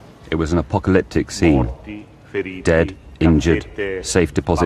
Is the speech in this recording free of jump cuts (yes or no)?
no